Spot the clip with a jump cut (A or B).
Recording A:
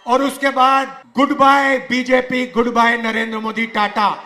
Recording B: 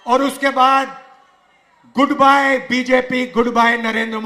A